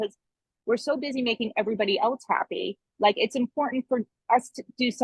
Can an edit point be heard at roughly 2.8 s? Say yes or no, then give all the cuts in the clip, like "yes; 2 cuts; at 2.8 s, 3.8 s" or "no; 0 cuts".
no; 0 cuts